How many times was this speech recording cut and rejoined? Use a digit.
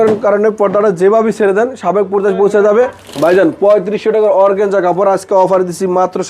1